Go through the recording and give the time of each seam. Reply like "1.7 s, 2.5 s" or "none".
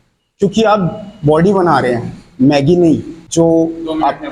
3.2 s